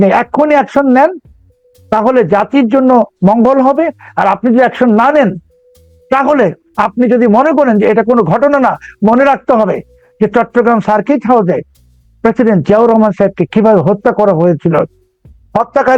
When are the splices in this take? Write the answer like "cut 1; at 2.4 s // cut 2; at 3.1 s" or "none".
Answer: none